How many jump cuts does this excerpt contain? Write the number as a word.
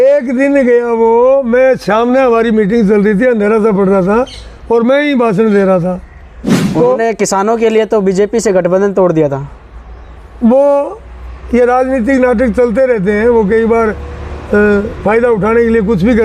zero